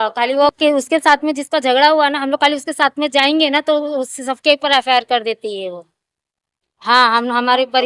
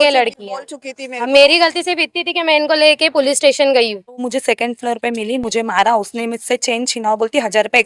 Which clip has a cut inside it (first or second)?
second